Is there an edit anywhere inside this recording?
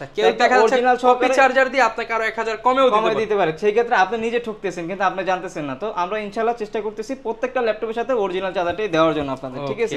no; 0 cuts

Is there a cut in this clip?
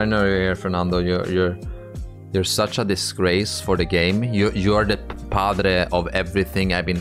no; 0 cuts

